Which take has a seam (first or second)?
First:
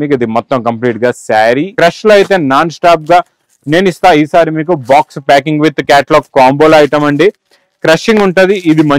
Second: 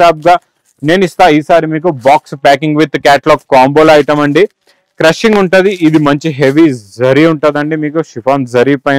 first